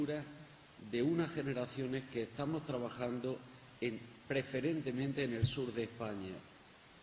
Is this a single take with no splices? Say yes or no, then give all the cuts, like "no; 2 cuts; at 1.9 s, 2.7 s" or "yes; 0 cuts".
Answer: no; 1 cut; at 4.9 s